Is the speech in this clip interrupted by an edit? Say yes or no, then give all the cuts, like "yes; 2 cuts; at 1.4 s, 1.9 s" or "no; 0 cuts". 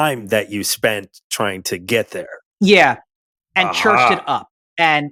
no; 0 cuts